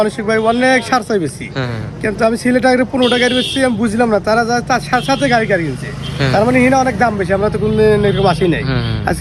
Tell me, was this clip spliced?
no; 0 cuts

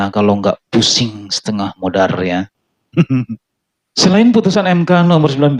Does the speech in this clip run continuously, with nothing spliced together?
yes; 0 cuts

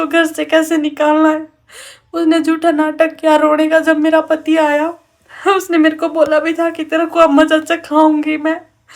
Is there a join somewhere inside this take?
no; 0 cuts

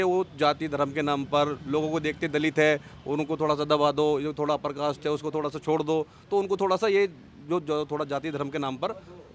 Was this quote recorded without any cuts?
yes; 0 cuts

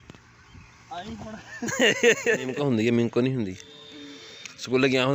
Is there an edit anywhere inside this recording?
yes; 1 cut; at 2.5 s

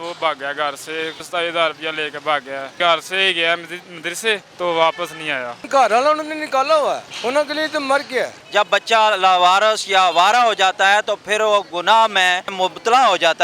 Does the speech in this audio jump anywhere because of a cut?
yes; 7 cuts; at 1.2 s, 2.7 s, 4.5 s, 5.6 s, 7.1 s, 8.4 s, 12.5 s

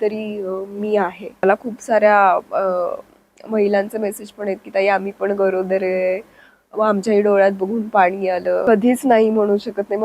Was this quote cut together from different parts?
yes; 2 cuts; at 1.4 s, 8.6 s

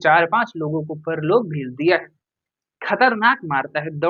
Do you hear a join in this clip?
no; 0 cuts

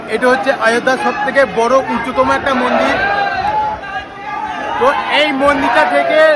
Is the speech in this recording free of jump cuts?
yes; 0 cuts

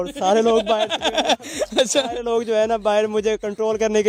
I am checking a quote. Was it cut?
no; 0 cuts

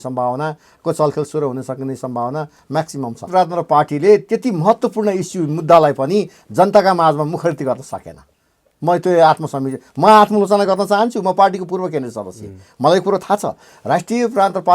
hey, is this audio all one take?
no; 1 cut; at 3.3 s

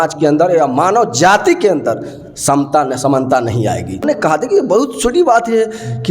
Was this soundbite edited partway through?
yes; 1 cut; at 4.0 s

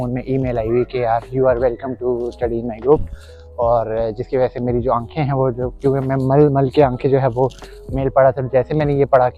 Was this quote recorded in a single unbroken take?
yes; 0 cuts

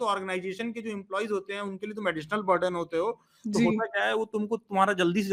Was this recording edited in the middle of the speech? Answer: no; 0 cuts

